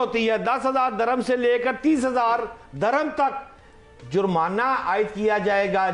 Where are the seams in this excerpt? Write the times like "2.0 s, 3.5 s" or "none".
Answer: none